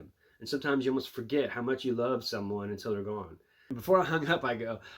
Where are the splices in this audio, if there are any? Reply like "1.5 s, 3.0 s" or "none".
3.7 s